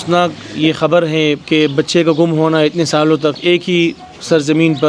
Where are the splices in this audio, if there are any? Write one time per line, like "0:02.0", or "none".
0:01.4